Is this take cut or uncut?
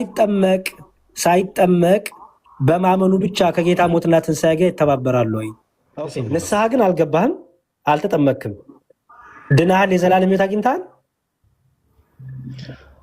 cut